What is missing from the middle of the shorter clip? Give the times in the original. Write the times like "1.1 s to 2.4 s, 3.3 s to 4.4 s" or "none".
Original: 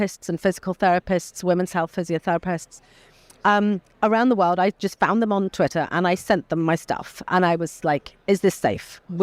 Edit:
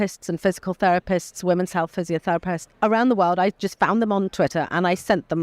2.7 s to 3.9 s

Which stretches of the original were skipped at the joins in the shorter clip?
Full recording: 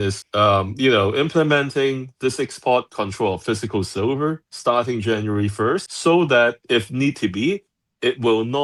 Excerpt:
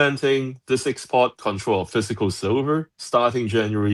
none

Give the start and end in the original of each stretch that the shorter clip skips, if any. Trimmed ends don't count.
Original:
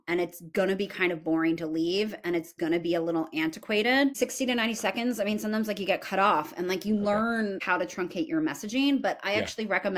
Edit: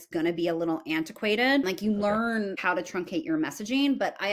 4.1 s to 6.7 s

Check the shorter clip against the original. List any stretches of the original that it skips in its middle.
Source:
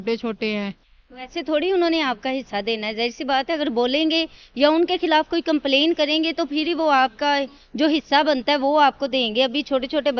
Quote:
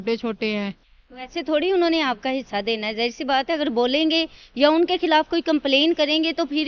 none

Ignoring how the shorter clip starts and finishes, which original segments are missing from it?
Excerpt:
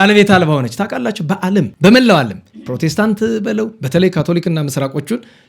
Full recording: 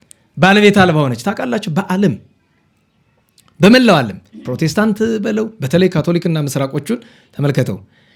2.2 s to 3.5 s

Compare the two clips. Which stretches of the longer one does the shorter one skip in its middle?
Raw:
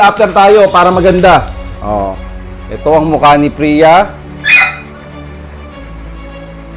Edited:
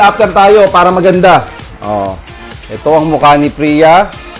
none

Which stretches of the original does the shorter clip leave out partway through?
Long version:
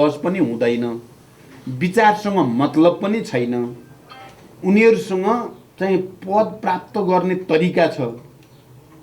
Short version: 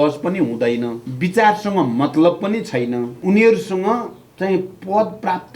1.0 s to 1.6 s, 3.7 s to 4.5 s

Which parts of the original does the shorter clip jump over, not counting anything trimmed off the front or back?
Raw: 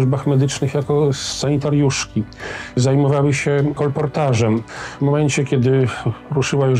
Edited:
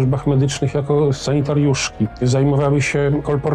1.2 s to 1.4 s, 2.3 s to 2.7 s

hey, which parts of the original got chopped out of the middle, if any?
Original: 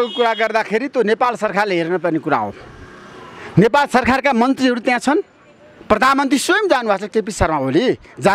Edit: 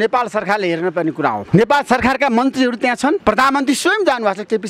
2.5 s to 3.5 s, 5.2 s to 5.8 s

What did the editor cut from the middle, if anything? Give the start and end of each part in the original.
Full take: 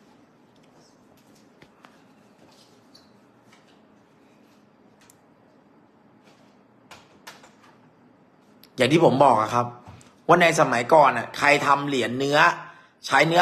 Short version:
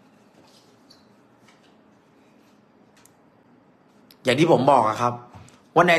5.5 s to 8.0 s

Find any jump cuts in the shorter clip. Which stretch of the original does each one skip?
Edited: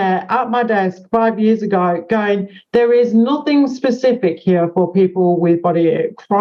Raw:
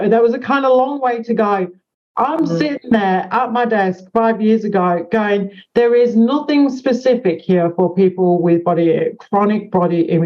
none

